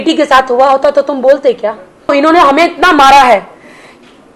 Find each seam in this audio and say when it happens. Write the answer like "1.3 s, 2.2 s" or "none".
2.1 s